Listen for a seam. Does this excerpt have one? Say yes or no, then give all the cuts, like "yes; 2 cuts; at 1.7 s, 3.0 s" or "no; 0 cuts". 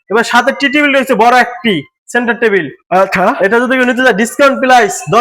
no; 0 cuts